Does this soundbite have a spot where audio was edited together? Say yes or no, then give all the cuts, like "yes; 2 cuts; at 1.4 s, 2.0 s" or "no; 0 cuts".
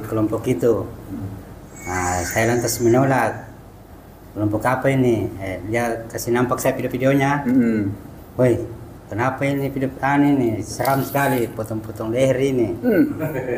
no; 0 cuts